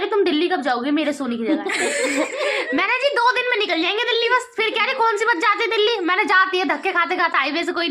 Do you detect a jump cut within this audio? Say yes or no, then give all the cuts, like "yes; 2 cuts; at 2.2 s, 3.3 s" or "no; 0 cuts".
no; 0 cuts